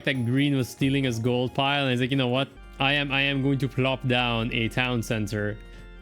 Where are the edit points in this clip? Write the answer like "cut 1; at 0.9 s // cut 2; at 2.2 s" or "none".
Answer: cut 1; at 2.5 s